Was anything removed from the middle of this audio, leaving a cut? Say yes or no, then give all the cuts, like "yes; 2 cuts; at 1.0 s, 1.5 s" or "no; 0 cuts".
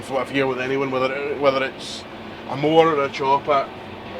no; 0 cuts